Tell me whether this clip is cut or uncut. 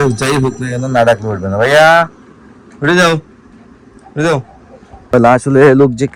cut